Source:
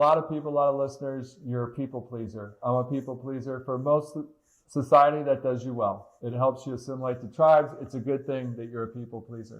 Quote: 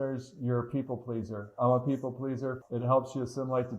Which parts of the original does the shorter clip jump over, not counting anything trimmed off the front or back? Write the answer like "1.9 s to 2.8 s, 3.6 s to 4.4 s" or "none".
3.6 s to 6.1 s